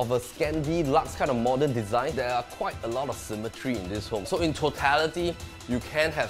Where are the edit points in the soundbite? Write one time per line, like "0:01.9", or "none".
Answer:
0:02.1
0:04.2